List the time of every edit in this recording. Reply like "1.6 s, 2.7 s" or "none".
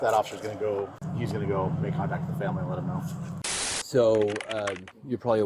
1.0 s, 3.3 s